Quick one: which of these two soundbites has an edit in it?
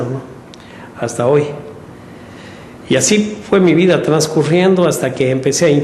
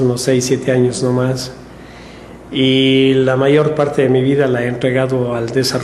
second; 1 cut; at 1.0 s

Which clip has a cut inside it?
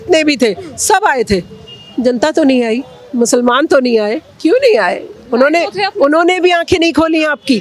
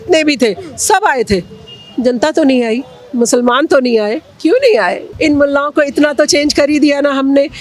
second; 1 cut; at 5.0 s

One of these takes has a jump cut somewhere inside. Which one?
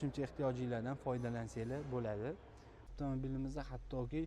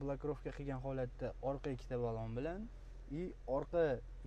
first; 1 cut; at 2.9 s

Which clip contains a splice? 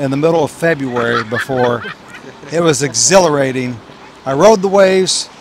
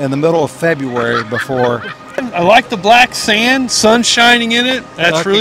second; 1 cut; at 2.3 s

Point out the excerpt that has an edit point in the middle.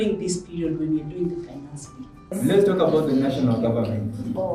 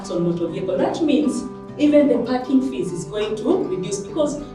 first; 1 cut; at 2.4 s

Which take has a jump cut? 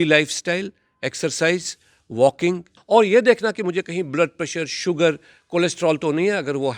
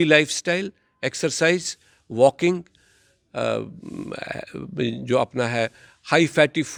first; 1 cut; at 2.7 s

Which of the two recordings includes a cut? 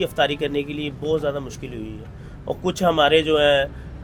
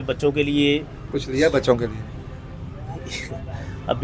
second; 1 cut; at 1.0 s

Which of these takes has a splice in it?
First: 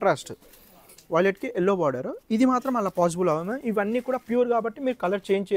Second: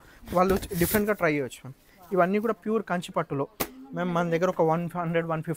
second; 1 cut; at 3.8 s

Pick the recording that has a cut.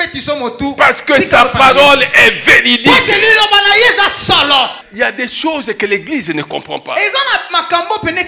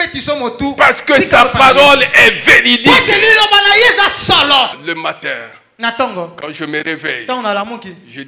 second; 1 cut; at 4.8 s

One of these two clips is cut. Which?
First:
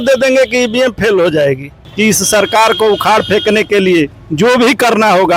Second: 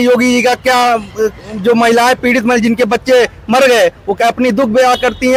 first; 2 cuts; at 1.8 s, 4.2 s

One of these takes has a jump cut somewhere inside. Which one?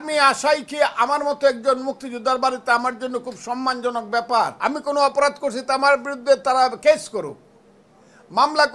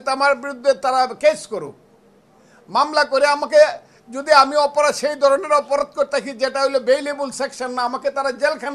first; 1 cut; at 4.5 s

